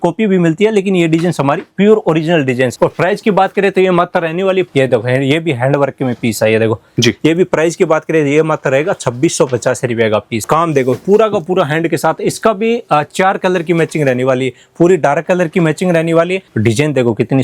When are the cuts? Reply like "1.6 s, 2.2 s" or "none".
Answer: 2.7 s, 4.7 s, 10.4 s, 16.5 s